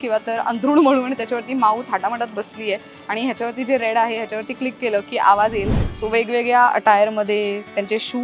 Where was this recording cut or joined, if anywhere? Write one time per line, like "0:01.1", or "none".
0:05.7